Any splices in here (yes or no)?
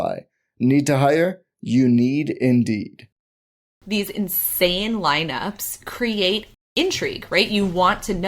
yes